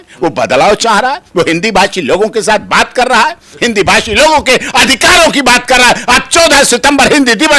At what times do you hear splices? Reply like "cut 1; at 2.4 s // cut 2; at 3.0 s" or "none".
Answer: none